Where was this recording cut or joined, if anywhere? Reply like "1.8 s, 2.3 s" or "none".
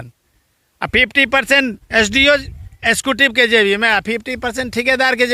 none